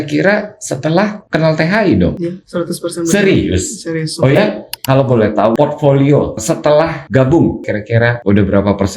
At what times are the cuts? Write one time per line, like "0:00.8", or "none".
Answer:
0:04.7
0:06.4